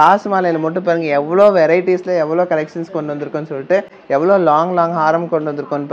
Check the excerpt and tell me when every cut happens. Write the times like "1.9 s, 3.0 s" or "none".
none